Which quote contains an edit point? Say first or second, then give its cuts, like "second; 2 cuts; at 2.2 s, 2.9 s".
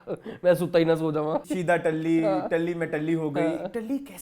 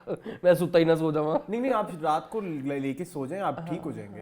first; 1 cut; at 1.4 s